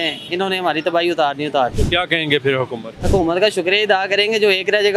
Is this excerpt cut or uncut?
cut